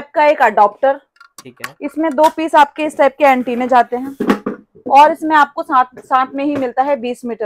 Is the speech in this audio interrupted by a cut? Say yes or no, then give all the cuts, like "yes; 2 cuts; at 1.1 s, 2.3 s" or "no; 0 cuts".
no; 0 cuts